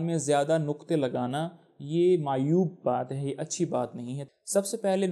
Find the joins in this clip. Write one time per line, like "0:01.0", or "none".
0:04.2

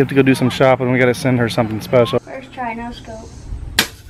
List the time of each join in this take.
0:02.2

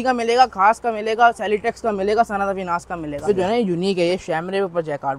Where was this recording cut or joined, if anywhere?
0:03.2

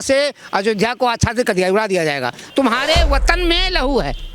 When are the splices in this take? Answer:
0:02.4

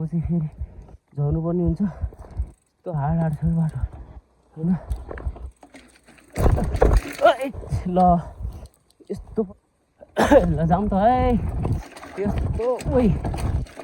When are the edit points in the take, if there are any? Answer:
0:09.5

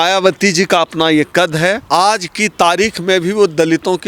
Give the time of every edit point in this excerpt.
0:01.8

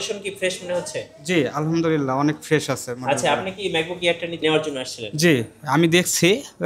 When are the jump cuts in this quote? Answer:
0:04.4

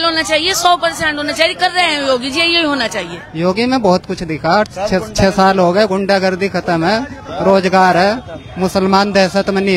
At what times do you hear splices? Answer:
0:03.2

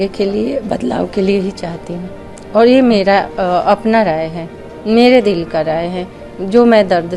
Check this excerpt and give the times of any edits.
none

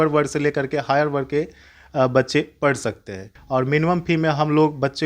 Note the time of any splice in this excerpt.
0:03.4

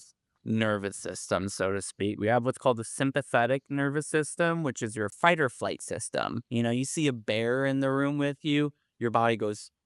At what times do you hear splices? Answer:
0:05.1

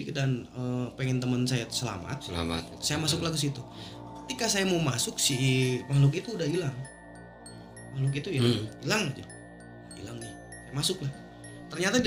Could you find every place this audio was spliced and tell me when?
none

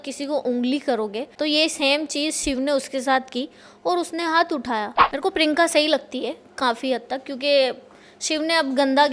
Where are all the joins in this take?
0:01.3
0:05.0

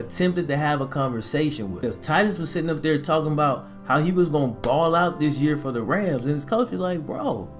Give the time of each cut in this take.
0:01.7

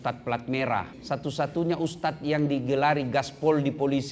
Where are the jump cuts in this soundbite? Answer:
0:00.9

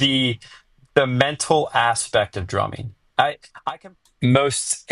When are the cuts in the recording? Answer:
0:03.5

